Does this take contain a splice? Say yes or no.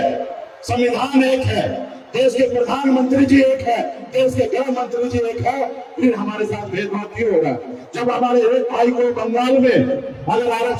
no